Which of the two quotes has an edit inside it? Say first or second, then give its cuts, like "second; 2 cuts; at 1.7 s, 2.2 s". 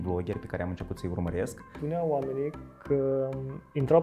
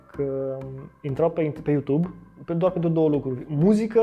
first; 1 cut; at 1.8 s